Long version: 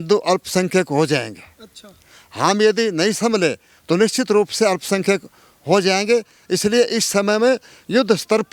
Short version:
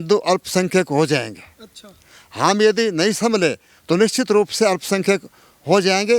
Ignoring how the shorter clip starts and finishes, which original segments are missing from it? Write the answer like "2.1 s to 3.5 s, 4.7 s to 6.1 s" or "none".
none